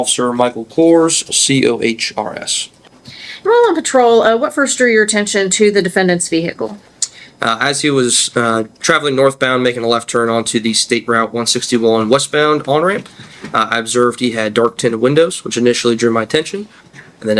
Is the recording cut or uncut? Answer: uncut